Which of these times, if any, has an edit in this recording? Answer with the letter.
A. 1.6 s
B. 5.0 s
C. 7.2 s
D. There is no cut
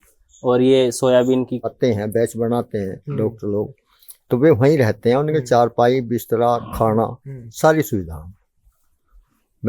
A